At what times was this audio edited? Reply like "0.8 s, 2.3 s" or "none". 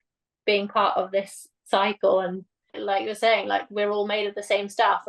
2.7 s